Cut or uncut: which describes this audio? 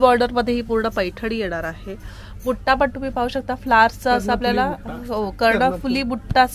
uncut